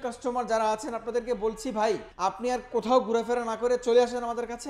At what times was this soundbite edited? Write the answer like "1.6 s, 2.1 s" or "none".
2.1 s